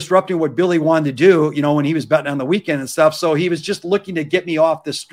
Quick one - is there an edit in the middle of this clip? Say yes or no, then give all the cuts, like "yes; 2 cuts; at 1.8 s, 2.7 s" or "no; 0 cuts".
no; 0 cuts